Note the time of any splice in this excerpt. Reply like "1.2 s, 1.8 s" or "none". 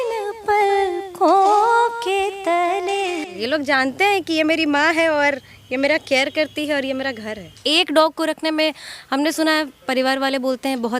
3.4 s, 7.5 s

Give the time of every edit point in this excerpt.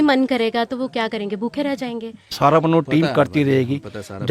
2.4 s

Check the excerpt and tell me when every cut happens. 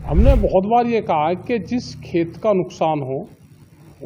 none

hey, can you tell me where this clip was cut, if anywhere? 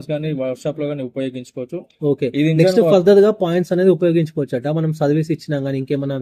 none

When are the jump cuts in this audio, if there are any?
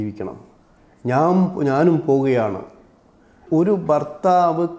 3.4 s

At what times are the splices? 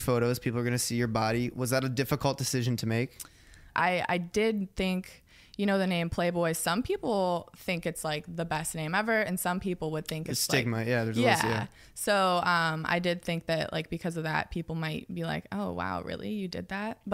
3.7 s

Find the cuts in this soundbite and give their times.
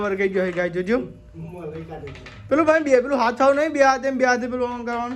none

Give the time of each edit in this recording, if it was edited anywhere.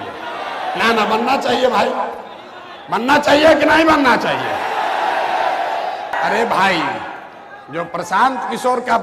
6.1 s

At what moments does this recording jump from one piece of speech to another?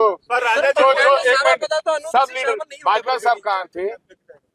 none

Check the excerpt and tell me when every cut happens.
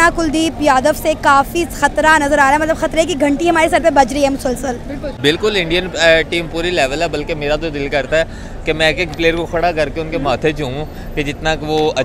5.0 s

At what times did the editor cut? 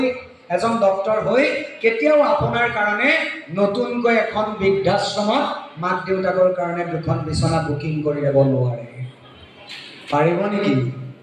none

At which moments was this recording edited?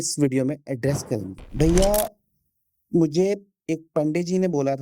1.4 s

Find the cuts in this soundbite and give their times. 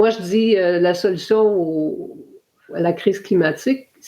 2.7 s

